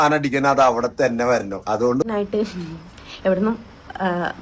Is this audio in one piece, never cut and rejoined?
no; 1 cut; at 2.0 s

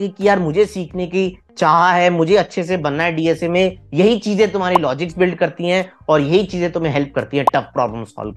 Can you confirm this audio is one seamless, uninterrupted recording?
yes; 0 cuts

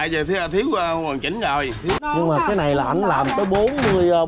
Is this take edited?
yes; 1 cut; at 2.0 s

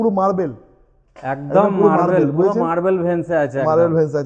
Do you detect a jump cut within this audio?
no; 0 cuts

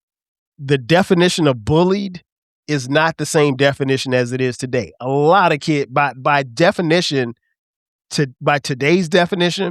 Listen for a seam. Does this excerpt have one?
no; 0 cuts

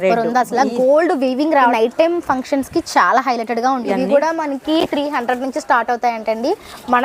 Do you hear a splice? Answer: yes; 2 cuts; at 1.7 s, 3.9 s

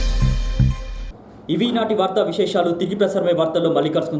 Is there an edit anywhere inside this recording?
no; 0 cuts

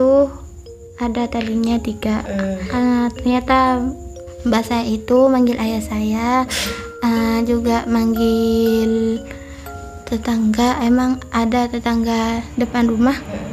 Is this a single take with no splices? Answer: no; 1 cut; at 2.6 s

